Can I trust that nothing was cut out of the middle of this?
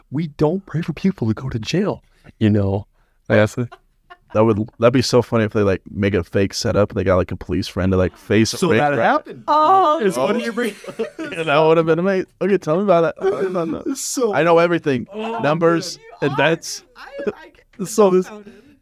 yes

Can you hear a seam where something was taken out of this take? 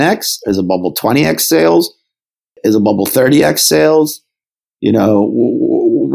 yes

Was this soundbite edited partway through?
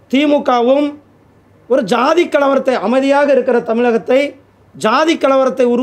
no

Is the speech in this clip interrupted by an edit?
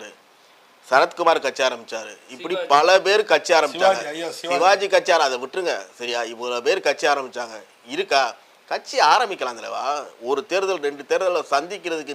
no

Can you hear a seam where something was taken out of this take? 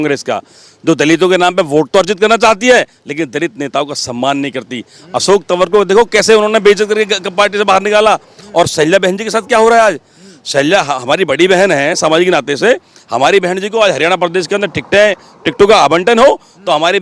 no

